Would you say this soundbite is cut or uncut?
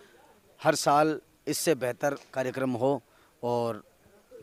uncut